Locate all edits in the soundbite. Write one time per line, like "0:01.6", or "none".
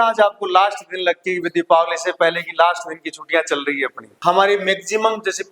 0:04.1